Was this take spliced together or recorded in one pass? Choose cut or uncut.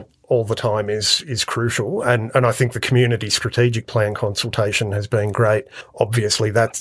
cut